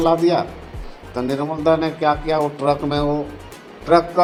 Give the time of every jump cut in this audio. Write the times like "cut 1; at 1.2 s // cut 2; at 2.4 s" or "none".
none